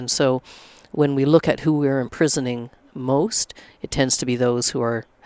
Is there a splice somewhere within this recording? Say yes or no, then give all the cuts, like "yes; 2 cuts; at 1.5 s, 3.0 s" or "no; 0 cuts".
no; 0 cuts